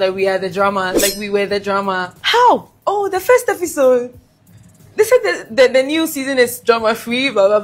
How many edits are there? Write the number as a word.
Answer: zero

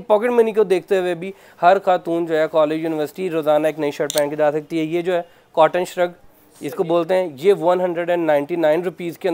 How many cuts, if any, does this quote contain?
zero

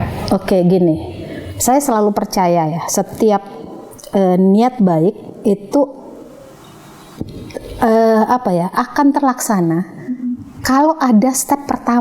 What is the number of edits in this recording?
zero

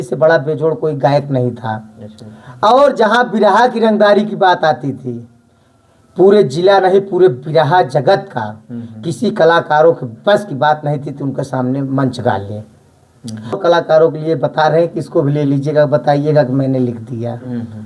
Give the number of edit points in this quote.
one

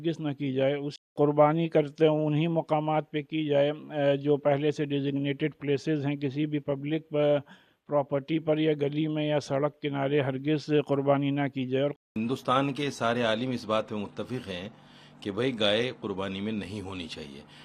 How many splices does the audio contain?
two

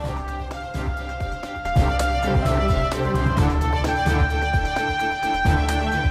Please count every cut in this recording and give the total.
zero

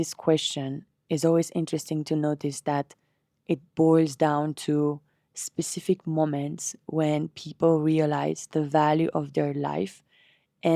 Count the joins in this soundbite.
zero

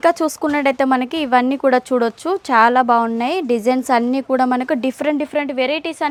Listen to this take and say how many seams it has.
zero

